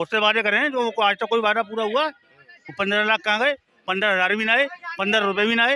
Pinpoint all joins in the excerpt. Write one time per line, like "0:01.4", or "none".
none